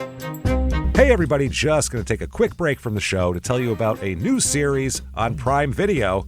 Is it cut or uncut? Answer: cut